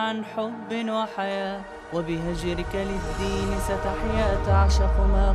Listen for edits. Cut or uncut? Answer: uncut